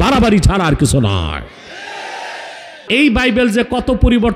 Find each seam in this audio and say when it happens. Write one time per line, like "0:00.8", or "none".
0:02.9